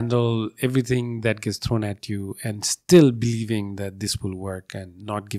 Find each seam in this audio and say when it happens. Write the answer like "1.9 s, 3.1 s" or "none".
none